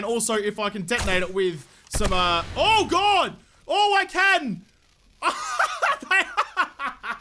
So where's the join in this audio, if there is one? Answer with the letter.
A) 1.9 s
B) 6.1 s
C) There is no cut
C